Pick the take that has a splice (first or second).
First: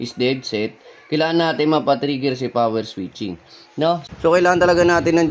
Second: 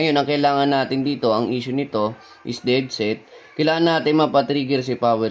first